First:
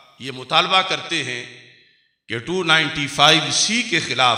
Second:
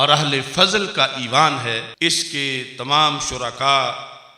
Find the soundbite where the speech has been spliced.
second; 1 cut; at 1.9 s

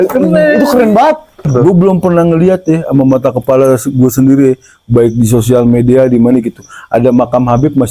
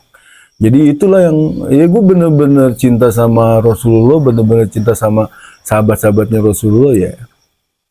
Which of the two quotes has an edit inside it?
first; 1 cut; at 1.5 s

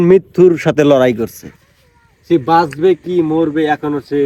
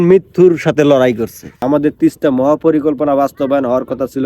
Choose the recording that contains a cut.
second; 1 cut; at 1.5 s

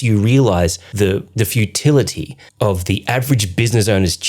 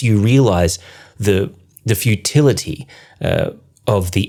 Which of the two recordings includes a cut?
first; 2 cuts; at 1.1 s, 2.4 s

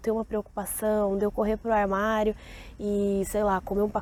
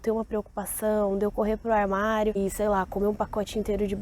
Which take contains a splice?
second; 1 cut; at 2.4 s

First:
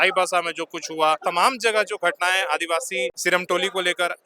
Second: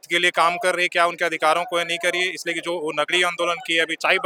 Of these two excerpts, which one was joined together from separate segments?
first; 2 cuts; at 1.2 s, 3.2 s

